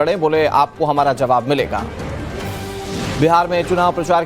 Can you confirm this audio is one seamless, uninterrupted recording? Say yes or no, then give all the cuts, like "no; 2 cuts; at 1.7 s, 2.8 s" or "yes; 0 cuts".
no; 1 cut; at 2.1 s